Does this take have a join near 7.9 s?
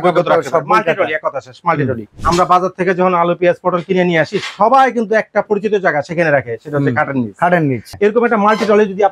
yes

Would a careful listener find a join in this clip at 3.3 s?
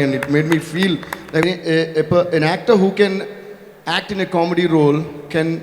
no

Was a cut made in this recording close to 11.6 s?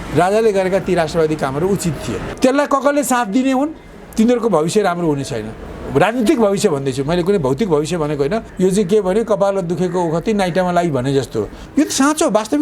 yes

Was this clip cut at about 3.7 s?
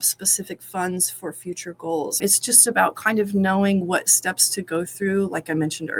no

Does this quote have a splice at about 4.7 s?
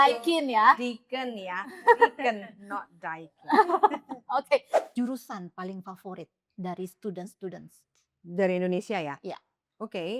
yes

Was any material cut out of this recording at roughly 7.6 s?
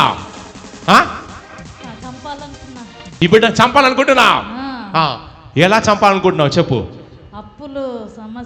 no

